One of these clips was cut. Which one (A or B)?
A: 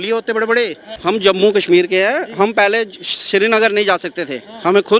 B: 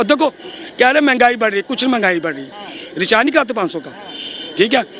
A